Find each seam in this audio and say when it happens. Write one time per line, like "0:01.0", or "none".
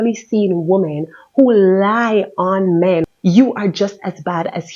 0:03.0